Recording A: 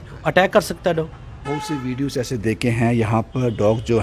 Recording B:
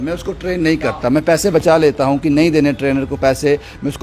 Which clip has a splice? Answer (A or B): A